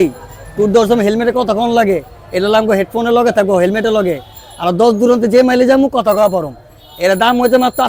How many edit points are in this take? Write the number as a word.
zero